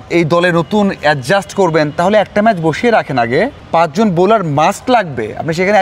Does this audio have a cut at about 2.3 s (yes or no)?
no